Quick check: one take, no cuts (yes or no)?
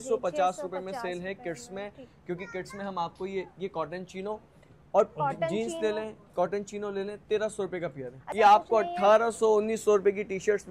no